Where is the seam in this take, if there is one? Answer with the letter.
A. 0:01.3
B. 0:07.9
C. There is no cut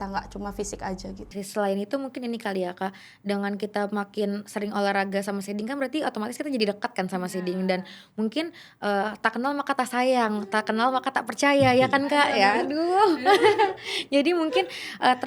A